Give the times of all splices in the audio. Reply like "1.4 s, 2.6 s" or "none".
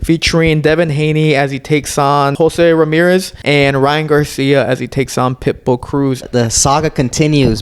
2.3 s, 3.3 s, 6.3 s